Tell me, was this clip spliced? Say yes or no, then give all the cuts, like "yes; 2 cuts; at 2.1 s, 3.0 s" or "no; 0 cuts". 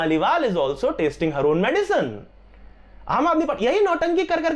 no; 0 cuts